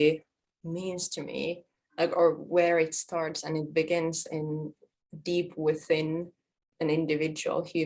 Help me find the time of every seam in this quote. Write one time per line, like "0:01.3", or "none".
none